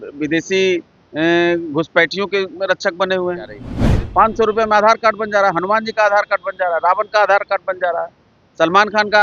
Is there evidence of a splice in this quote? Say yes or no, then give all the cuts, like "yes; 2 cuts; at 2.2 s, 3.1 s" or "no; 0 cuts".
yes; 1 cut; at 3.6 s